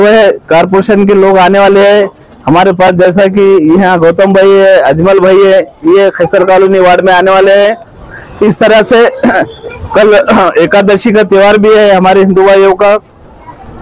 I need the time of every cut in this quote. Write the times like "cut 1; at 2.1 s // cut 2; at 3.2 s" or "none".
none